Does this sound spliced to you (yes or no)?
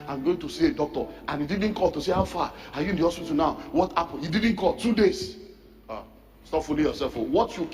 no